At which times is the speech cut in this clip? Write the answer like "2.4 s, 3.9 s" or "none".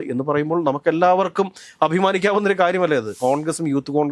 3.1 s